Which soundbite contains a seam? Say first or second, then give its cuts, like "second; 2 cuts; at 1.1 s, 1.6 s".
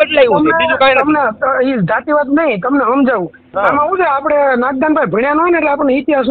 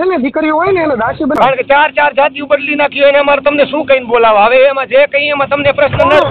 second; 1 cut; at 1.4 s